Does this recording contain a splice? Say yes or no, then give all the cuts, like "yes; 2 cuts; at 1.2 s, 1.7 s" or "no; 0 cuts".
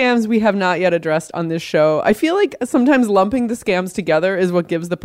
no; 0 cuts